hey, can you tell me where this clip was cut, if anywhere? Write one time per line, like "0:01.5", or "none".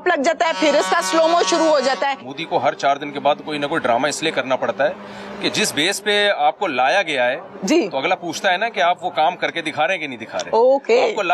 0:02.3